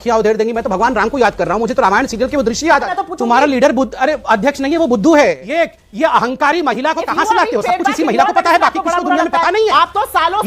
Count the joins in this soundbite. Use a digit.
2